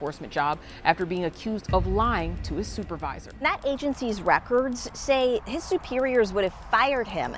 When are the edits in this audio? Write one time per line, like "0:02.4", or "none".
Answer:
0:03.2